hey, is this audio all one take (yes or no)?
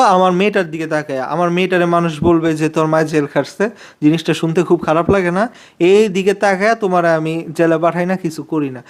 yes